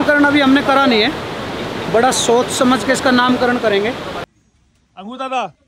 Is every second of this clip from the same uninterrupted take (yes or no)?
no